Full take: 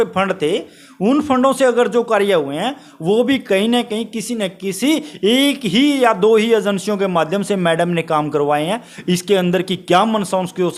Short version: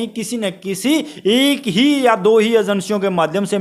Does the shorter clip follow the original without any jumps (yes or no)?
yes